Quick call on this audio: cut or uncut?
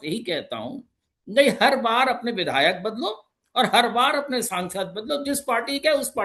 uncut